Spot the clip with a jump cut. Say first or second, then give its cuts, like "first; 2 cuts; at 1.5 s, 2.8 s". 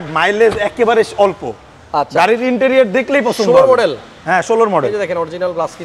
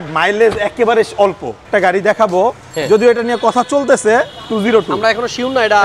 second; 1 cut; at 1.6 s